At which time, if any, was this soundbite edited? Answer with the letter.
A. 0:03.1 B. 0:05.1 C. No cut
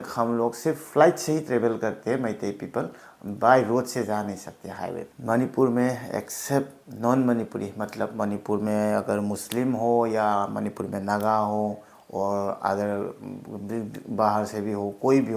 B